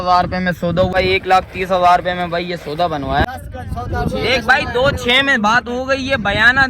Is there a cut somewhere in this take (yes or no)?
yes